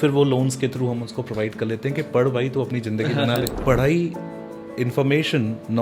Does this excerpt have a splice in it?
yes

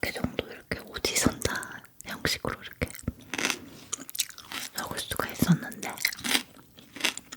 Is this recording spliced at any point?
no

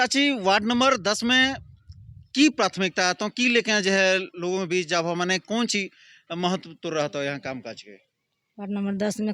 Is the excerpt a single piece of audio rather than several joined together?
yes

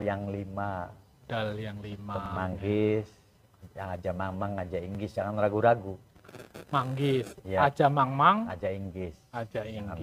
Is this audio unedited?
no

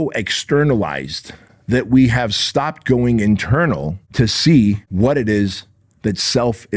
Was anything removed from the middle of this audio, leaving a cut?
yes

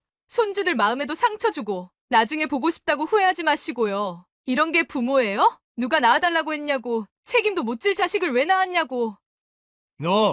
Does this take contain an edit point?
yes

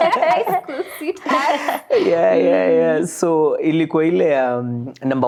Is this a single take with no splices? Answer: yes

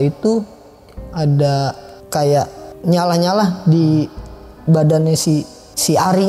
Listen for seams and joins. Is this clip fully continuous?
no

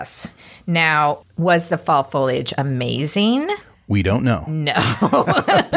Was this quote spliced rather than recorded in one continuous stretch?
no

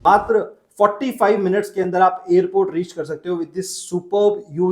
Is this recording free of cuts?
yes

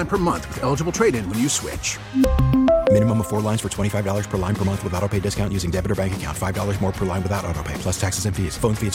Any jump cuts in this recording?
no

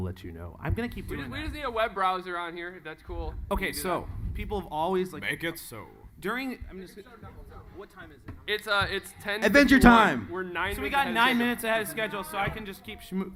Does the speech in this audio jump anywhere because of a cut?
no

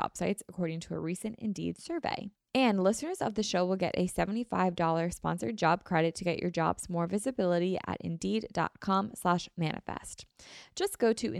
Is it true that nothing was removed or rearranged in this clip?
no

